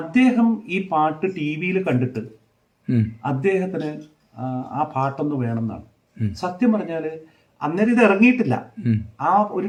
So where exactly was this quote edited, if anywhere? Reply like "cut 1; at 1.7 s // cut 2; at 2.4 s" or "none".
none